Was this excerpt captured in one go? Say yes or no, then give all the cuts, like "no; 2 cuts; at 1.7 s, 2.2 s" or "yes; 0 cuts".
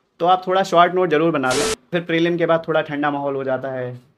no; 1 cut; at 1.8 s